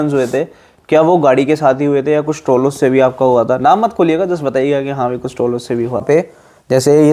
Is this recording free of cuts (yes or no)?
no